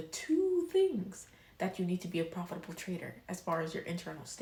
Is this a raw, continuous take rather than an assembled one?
yes; 0 cuts

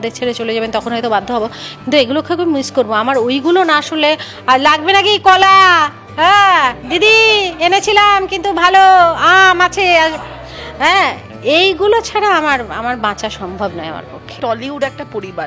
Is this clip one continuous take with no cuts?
no; 1 cut; at 14.4 s

